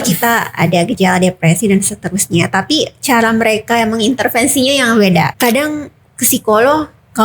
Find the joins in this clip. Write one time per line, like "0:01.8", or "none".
0:05.3